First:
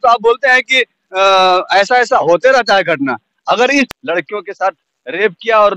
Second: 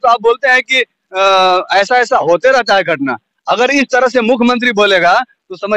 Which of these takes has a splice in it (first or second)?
first